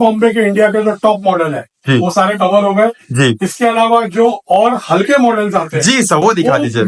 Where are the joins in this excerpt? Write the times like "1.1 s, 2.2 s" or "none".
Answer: none

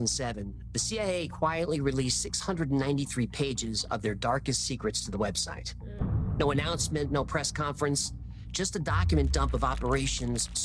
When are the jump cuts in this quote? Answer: none

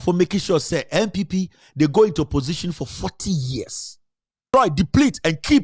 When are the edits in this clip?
4.4 s

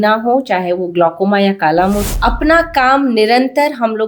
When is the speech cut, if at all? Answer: 2.1 s

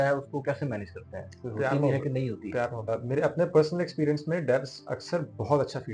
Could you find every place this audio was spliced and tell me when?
2.9 s

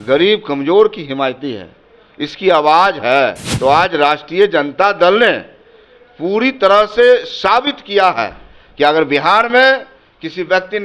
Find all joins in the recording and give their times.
3.4 s

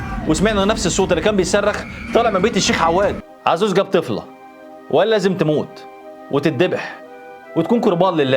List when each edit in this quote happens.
3.3 s

